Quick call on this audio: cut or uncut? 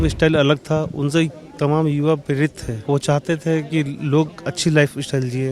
cut